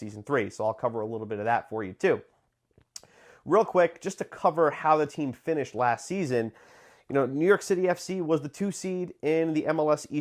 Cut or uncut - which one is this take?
cut